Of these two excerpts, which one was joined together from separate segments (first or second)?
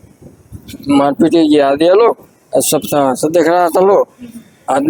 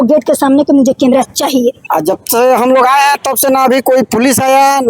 second